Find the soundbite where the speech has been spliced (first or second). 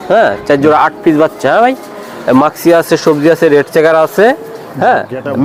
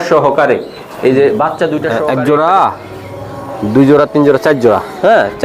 second